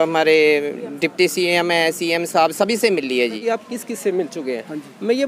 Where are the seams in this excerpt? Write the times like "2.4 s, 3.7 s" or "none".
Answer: 3.4 s

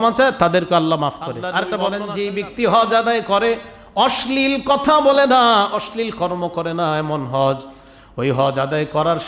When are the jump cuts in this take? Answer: 1.6 s

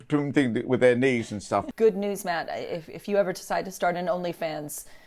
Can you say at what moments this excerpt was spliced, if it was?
1.7 s

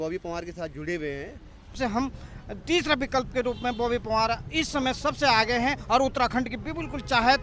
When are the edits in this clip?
1.8 s

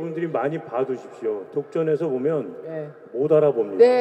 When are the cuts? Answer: none

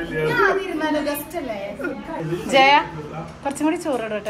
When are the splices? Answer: 2.2 s

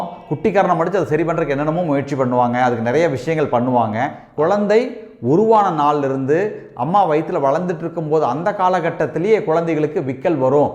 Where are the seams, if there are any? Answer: 4.2 s

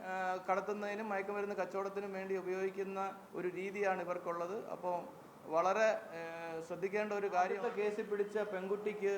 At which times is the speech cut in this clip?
7.6 s

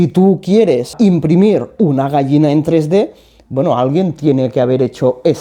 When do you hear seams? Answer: 0.9 s

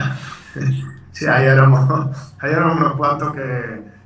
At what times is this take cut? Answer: none

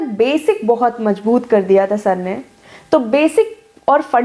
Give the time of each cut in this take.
none

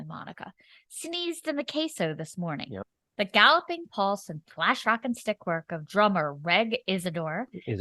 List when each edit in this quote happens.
3.0 s

